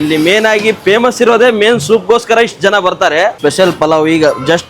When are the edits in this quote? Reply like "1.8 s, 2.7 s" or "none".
3.4 s